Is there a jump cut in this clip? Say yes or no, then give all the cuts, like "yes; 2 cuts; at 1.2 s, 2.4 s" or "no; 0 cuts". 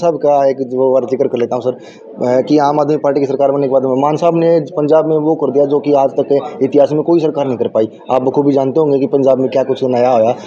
no; 0 cuts